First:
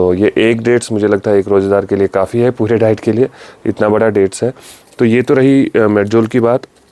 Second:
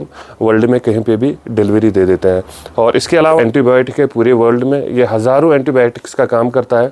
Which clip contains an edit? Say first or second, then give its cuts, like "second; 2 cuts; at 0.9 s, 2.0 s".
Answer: second; 1 cut; at 3.4 s